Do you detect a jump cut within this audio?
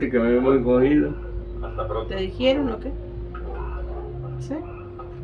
no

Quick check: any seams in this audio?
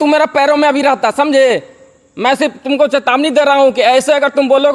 no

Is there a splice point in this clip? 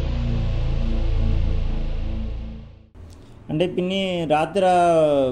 yes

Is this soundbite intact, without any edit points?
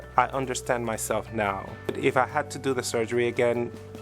no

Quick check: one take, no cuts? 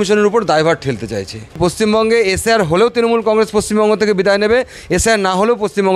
no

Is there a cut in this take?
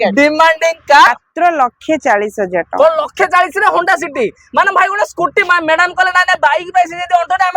yes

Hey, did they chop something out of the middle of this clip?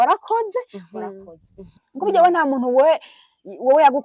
yes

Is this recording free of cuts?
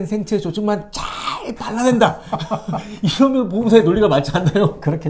yes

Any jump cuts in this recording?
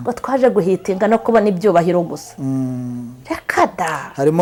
no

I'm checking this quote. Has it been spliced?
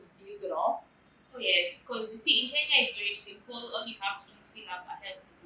no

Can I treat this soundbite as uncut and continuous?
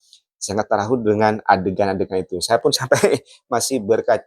yes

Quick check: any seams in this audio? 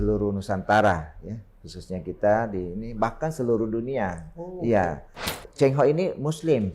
yes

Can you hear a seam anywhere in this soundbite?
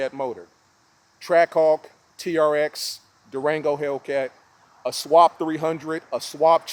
no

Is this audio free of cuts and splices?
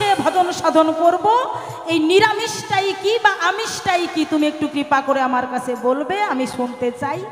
yes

